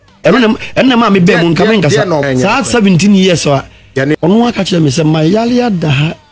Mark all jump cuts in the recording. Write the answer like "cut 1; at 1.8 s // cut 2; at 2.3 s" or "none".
cut 1; at 2.2 s // cut 2; at 4.2 s